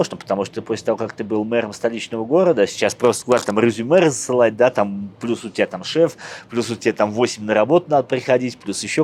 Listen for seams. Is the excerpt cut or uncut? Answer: uncut